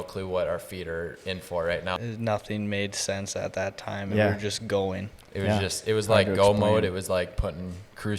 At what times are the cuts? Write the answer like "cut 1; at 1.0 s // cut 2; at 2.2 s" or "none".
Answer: cut 1; at 2.0 s